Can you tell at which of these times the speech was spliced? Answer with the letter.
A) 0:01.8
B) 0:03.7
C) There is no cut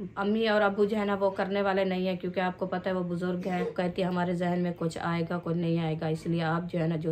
B